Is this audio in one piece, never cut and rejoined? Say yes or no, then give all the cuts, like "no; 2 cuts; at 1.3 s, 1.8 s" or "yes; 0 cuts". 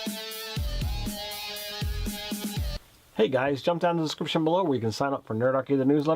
no; 1 cut; at 2.7 s